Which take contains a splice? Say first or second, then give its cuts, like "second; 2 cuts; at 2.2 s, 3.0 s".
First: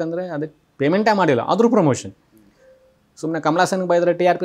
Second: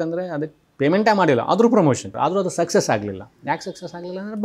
second; 1 cut; at 2.1 s